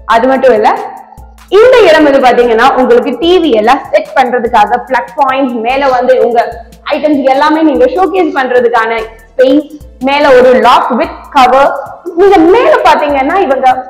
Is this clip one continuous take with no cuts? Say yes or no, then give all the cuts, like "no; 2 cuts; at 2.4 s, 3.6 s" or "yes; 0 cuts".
yes; 0 cuts